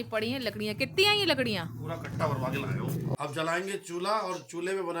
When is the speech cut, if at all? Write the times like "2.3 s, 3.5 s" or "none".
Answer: 3.1 s

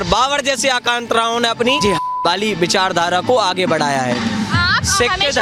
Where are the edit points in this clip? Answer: none

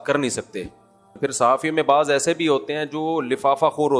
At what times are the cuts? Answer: 1.1 s

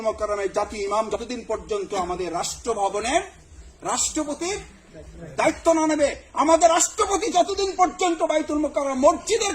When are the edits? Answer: 1.1 s

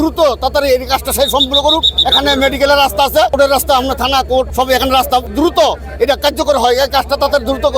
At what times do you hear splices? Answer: 3.3 s, 4.5 s, 5.3 s

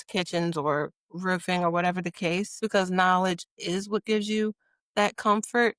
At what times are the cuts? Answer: 2.6 s

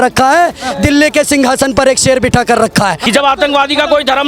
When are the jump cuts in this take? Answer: 3.0 s

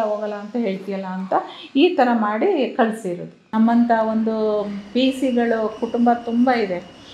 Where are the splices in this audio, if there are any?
3.3 s

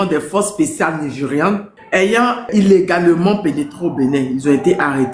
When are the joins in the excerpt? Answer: 2.5 s

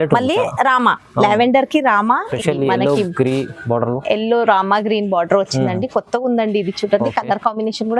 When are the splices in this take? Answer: 2.3 s

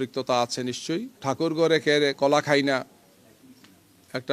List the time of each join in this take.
1.2 s

